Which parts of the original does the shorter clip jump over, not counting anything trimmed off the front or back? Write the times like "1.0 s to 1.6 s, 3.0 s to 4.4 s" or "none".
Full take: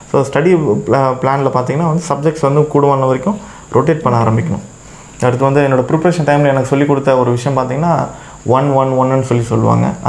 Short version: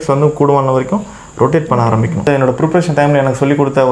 4.6 s to 5.6 s